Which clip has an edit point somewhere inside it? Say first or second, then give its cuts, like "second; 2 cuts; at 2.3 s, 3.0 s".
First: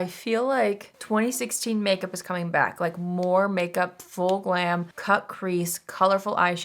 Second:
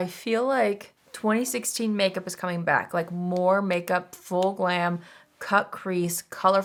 first; 2 cuts; at 0.9 s, 4.9 s